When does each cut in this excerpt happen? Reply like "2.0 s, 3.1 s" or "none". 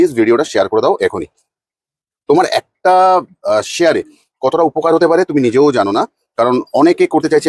none